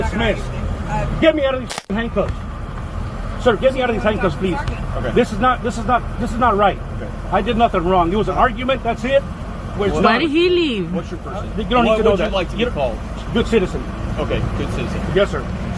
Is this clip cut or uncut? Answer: uncut